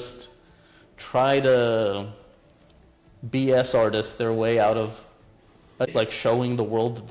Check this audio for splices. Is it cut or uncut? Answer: cut